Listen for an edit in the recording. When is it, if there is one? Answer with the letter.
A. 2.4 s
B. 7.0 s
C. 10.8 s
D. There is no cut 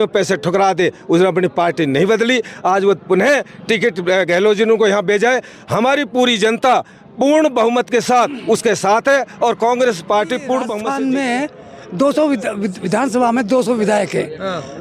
C